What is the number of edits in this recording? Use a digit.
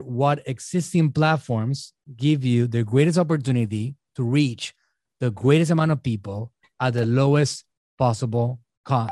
0